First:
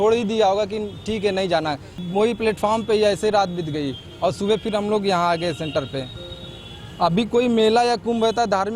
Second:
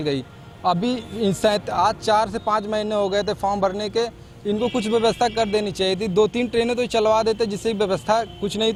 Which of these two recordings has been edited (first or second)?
first